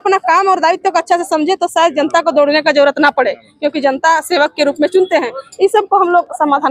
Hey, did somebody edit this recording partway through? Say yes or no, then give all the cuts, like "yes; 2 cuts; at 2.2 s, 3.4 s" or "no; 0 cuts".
no; 0 cuts